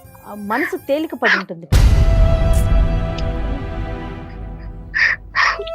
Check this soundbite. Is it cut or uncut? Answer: uncut